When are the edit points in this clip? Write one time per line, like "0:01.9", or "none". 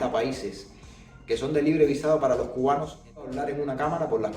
0:03.3